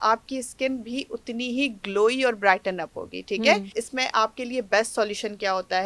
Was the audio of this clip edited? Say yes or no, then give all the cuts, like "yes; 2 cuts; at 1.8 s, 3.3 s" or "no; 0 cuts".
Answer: yes; 1 cut; at 3.8 s